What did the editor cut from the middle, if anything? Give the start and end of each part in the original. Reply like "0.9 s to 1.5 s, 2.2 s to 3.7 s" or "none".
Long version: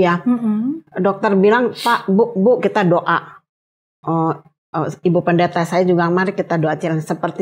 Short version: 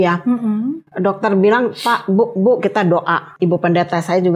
3.3 s to 4.9 s

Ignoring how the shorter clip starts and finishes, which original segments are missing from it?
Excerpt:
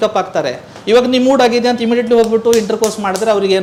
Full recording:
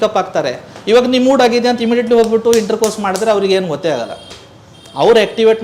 none

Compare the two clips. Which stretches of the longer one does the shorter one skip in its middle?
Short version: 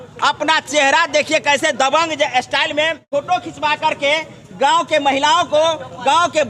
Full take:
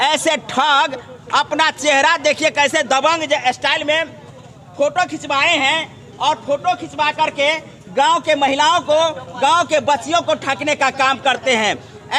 4.2 s to 6.4 s

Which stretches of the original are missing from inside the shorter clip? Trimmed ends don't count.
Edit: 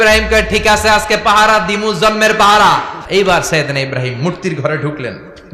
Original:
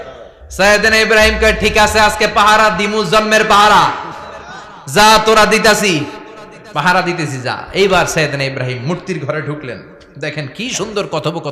4.1 s to 7.6 s

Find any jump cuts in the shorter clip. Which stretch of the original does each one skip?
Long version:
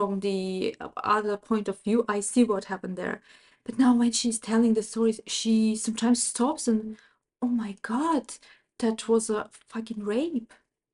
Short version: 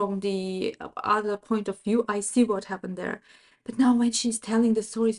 none

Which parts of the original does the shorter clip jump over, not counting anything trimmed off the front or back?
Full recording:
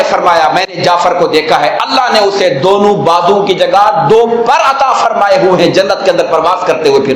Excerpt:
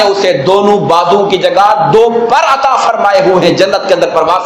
none

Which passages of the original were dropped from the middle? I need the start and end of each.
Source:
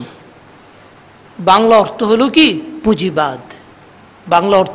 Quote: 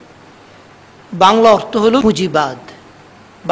2.3 s to 2.8 s

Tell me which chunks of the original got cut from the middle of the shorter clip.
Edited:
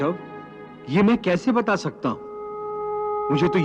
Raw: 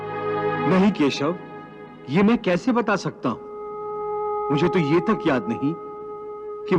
none

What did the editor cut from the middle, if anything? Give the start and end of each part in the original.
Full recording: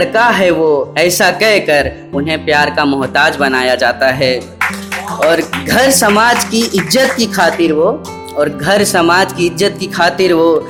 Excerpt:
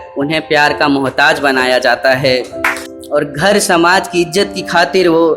4.9 s to 8.1 s

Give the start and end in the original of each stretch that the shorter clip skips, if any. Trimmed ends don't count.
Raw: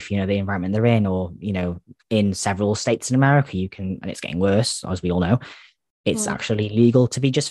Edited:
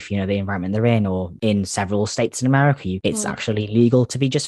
1.3 s to 2.0 s, 3.6 s to 6.0 s

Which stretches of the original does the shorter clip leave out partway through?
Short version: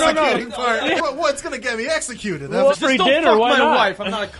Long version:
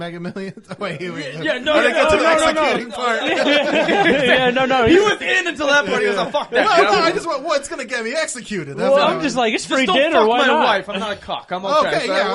3.4 s to 7.2 s, 9.0 s to 9.6 s

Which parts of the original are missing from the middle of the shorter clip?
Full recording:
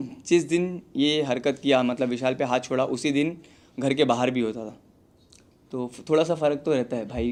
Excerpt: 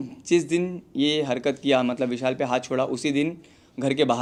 none

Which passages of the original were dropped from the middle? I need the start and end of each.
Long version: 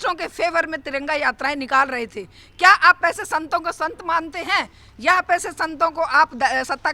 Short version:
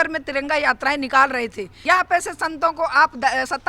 2.2 s to 4.8 s

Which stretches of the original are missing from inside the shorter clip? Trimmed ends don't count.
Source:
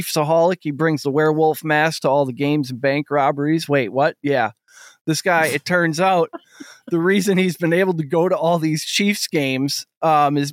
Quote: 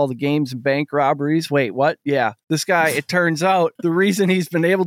4.6 s to 5.0 s, 6.3 s to 6.8 s

